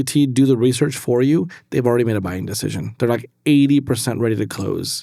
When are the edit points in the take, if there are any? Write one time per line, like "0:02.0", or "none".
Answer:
none